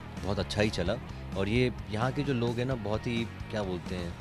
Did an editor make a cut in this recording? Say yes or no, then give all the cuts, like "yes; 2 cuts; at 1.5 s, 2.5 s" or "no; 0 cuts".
no; 0 cuts